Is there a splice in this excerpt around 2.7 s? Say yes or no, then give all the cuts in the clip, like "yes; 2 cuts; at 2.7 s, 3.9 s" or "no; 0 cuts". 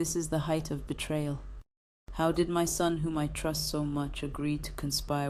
no; 0 cuts